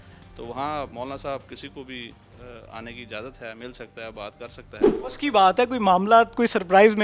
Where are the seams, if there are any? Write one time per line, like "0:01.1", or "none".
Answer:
0:05.0